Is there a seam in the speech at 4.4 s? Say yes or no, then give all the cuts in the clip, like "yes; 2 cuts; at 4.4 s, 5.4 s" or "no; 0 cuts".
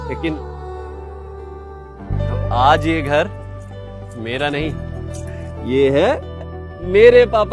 no; 0 cuts